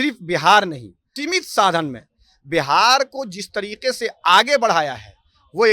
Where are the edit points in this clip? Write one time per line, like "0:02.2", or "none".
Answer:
0:01.1